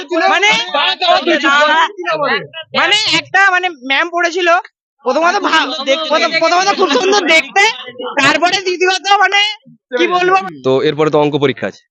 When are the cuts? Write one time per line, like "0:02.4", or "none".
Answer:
0:10.4